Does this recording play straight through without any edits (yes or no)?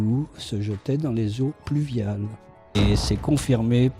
no